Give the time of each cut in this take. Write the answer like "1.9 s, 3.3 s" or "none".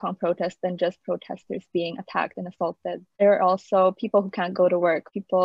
none